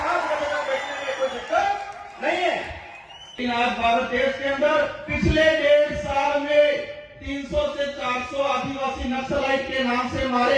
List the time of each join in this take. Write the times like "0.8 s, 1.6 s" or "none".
3.4 s